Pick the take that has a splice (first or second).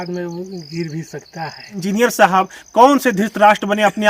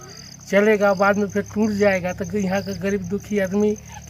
first